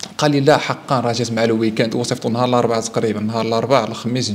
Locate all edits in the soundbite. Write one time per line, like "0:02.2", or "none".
none